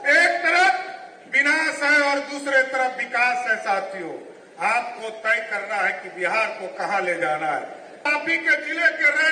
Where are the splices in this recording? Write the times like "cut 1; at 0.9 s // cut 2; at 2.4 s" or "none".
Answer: cut 1; at 8.0 s